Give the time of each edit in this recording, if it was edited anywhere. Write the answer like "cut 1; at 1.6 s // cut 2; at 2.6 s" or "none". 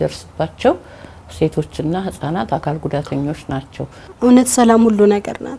cut 1; at 4.0 s